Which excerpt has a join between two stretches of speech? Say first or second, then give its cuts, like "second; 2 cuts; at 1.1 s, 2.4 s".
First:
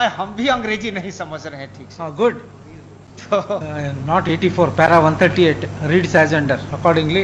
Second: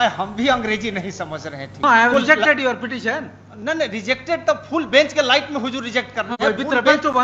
second; 1 cut; at 1.8 s